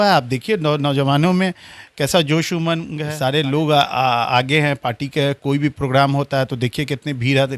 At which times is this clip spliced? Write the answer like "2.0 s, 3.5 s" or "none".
3.0 s